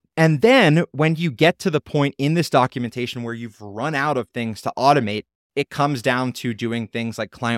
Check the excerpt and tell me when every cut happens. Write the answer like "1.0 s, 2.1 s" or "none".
none